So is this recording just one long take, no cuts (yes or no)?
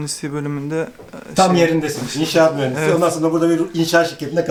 yes